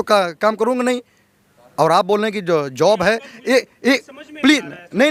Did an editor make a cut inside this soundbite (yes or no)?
no